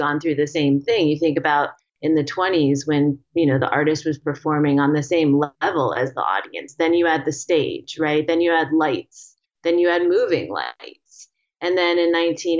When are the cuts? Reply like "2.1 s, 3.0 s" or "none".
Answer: none